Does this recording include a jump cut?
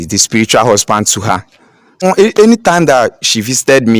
yes; 1 cut; at 2.0 s

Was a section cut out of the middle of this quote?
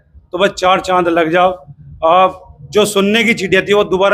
no; 0 cuts

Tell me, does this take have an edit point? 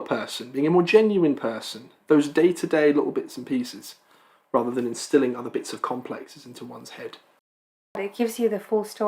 yes; 1 cut; at 8.1 s

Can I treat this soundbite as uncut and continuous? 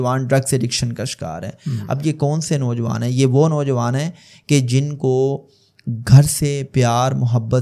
yes; 0 cuts

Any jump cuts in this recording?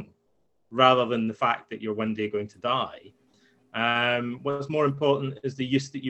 no; 0 cuts

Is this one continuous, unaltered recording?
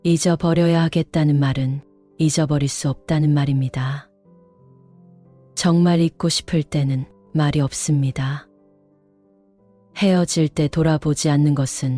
yes; 0 cuts

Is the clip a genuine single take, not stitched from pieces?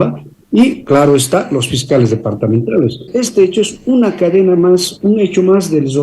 no; 1 cut; at 3.0 s

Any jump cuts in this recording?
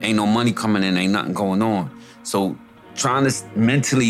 no; 0 cuts

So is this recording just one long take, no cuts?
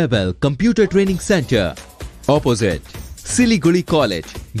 yes; 0 cuts

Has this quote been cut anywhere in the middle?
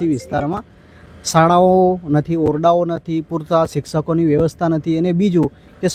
no; 0 cuts

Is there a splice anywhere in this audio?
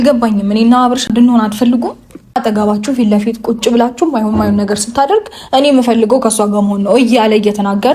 yes; 2 cuts; at 1.1 s, 2.3 s

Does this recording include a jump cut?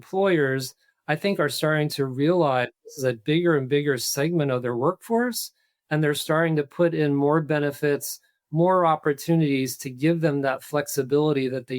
no; 0 cuts

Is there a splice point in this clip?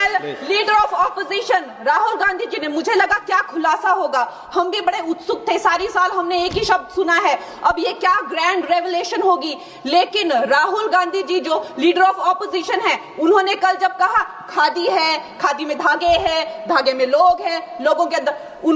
no; 0 cuts

